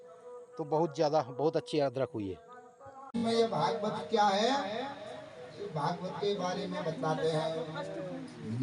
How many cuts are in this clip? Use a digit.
1